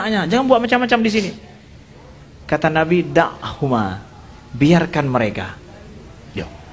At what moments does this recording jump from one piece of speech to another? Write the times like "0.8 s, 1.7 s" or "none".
none